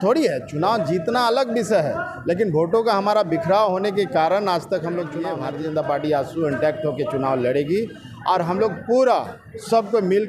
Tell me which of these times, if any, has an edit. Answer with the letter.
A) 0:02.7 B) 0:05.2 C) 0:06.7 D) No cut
B